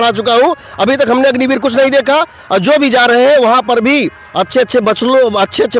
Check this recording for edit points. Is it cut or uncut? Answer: uncut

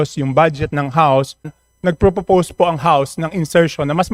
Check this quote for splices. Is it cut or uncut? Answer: cut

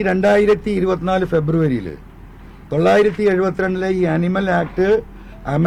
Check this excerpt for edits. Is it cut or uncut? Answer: uncut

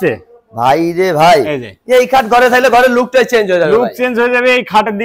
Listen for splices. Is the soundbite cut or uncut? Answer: uncut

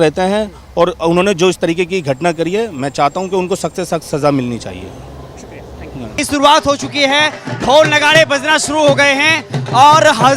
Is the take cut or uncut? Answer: uncut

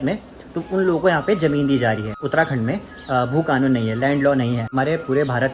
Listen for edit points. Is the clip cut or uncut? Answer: cut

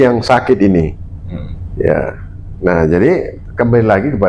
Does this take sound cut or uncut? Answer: uncut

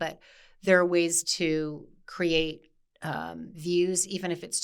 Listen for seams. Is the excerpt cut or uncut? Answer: uncut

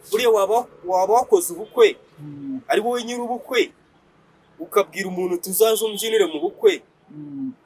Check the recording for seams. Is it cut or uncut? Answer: uncut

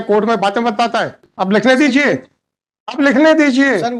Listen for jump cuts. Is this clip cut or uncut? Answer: cut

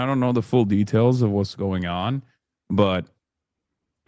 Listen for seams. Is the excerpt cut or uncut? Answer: uncut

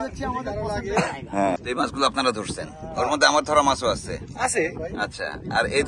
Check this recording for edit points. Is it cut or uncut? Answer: cut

